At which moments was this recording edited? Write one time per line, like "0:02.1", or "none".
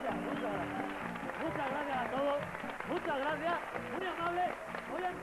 0:01.1